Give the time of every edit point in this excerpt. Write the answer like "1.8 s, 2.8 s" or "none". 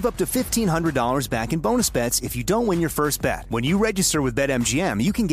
none